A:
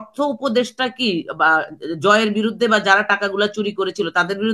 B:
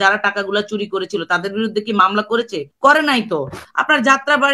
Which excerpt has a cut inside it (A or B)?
B